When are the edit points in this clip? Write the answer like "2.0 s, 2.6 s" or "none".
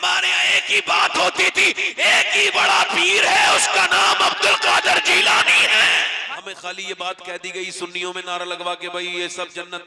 6.3 s